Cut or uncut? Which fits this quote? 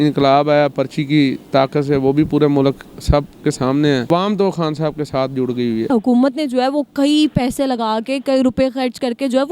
cut